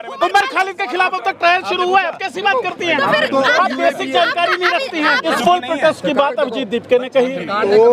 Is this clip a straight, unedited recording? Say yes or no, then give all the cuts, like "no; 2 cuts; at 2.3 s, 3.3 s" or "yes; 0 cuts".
no; 1 cut; at 5.3 s